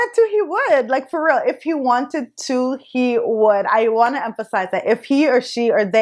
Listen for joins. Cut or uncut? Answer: uncut